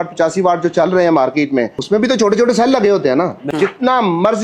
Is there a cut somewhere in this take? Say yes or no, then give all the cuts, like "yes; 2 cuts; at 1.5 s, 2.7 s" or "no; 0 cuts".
yes; 2 cuts; at 1.8 s, 3.5 s